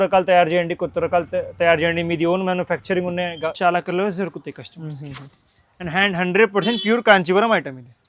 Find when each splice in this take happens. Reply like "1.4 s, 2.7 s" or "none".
3.5 s